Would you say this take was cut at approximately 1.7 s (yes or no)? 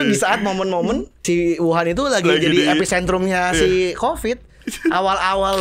no